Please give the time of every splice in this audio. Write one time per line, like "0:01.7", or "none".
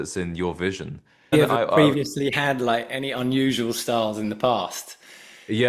0:01.3